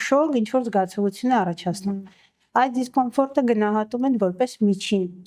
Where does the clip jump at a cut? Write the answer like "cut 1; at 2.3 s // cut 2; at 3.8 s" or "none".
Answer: none